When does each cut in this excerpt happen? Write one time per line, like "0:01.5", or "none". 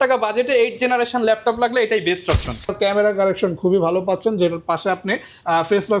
0:02.7

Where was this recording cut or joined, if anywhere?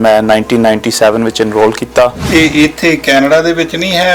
0:02.2

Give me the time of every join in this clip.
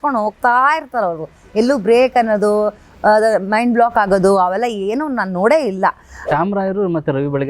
0:06.3

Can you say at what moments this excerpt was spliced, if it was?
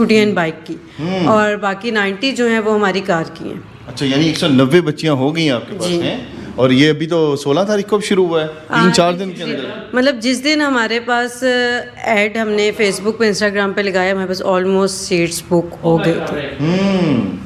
none

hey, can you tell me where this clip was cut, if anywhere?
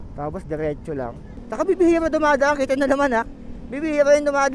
0:01.3

